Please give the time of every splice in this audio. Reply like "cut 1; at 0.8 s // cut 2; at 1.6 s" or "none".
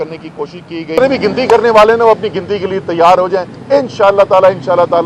cut 1; at 1.0 s

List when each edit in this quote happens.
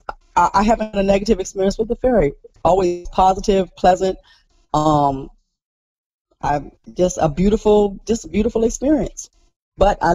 none

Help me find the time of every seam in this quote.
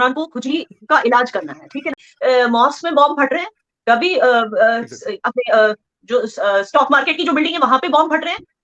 cut 1; at 2.0 s

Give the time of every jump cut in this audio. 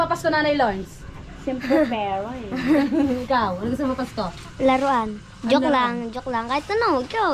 none

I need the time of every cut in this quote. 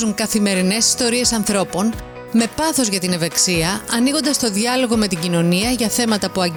none

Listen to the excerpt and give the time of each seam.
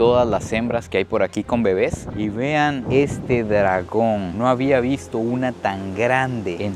cut 1; at 2.0 s

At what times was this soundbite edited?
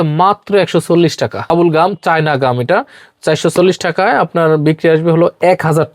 cut 1; at 1.5 s

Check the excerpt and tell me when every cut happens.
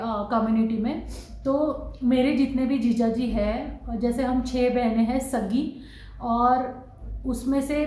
none

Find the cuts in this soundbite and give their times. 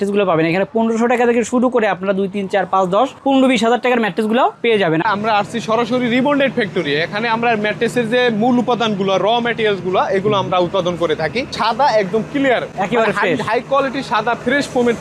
cut 1; at 5.0 s // cut 2; at 11.5 s

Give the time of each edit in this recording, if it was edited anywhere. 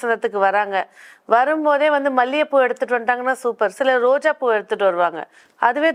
none

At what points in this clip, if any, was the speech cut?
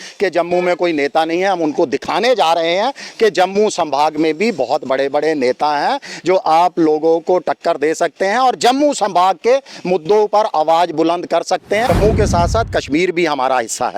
cut 1; at 11.9 s

